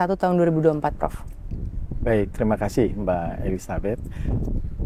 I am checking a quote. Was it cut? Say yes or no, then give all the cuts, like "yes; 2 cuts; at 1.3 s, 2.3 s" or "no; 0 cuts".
no; 0 cuts